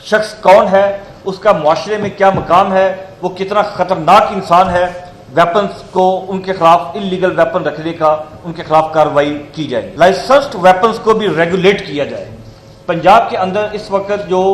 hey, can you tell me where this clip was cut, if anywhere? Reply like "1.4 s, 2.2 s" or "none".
9.8 s